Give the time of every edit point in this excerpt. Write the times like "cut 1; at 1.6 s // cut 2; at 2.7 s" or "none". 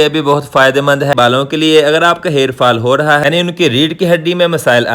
cut 1; at 1.1 s // cut 2; at 3.2 s